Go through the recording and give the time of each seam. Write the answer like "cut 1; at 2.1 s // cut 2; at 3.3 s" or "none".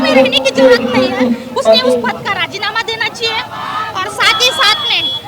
none